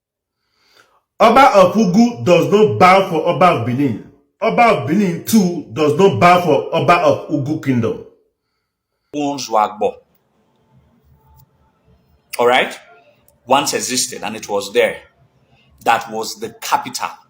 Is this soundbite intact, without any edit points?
no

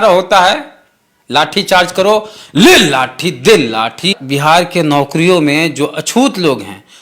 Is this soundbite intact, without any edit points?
no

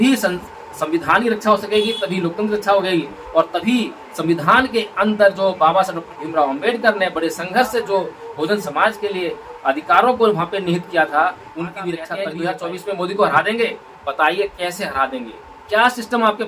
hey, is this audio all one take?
no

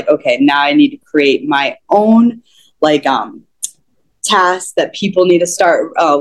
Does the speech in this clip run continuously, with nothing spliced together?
yes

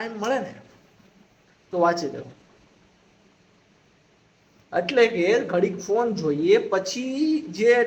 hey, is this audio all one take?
yes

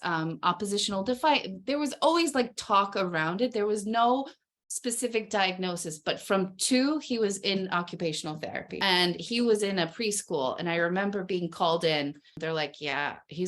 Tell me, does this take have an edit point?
yes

